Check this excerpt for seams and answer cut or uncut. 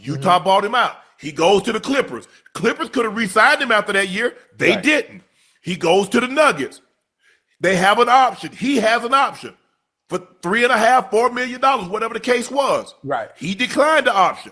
uncut